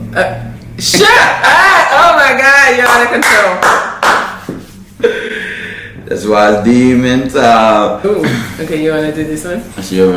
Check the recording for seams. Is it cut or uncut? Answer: uncut